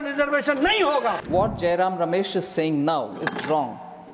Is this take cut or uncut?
cut